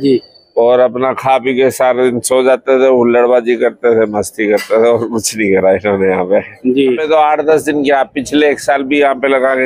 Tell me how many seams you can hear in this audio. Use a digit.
1